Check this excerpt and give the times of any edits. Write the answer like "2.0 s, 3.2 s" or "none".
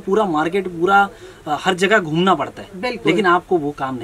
none